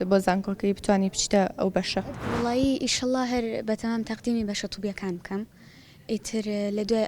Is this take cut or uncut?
cut